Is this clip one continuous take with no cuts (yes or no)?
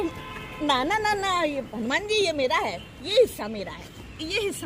yes